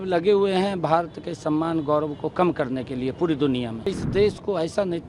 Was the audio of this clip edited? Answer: yes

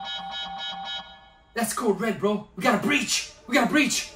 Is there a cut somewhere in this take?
no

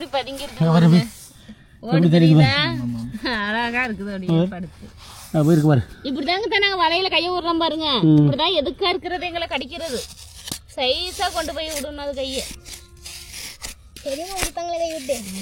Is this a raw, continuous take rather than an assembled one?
yes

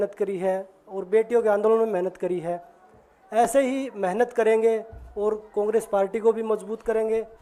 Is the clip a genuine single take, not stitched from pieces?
yes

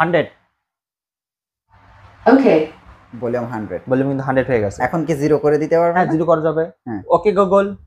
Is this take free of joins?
yes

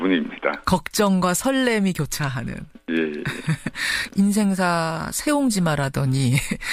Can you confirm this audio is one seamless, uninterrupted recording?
no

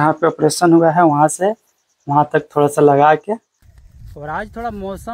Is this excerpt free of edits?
no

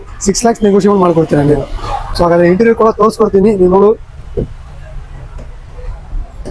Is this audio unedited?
yes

